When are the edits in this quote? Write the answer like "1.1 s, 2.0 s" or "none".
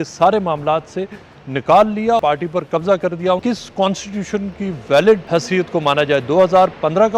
2.2 s, 3.4 s, 5.2 s